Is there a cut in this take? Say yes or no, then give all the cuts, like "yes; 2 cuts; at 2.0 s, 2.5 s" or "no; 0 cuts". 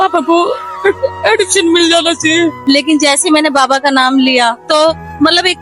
yes; 2 cuts; at 2.6 s, 4.6 s